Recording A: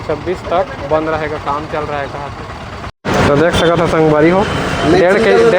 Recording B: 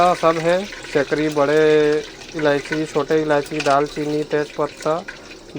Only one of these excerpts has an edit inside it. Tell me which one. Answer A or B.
A